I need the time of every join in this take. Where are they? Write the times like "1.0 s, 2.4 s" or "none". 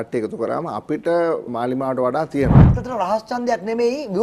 1.5 s, 2.6 s